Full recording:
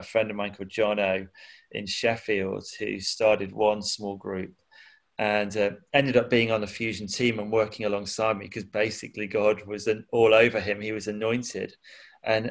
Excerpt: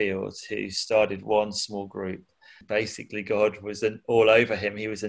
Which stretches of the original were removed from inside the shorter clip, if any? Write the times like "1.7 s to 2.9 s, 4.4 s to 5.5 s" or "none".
4.8 s to 8.6 s